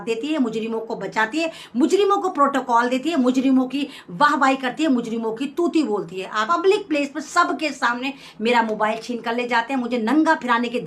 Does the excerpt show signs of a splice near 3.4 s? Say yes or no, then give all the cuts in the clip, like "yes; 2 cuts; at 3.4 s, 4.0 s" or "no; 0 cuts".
no; 1 cut; at 6.4 s